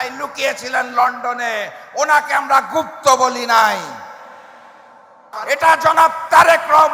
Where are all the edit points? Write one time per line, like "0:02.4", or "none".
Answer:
0:05.3